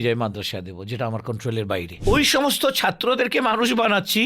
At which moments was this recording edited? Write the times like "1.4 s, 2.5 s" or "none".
2.0 s